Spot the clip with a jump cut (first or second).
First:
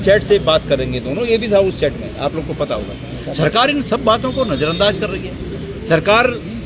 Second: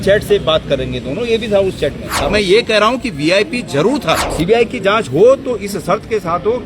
second